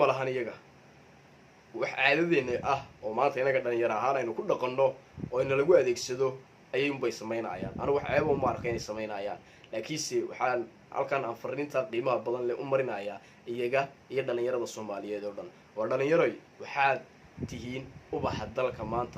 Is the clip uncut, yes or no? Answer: no